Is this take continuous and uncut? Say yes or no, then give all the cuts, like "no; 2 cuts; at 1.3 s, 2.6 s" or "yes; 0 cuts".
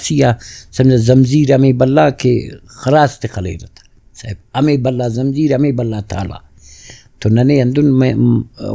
yes; 0 cuts